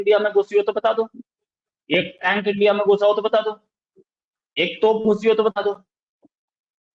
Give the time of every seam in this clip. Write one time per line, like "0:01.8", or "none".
none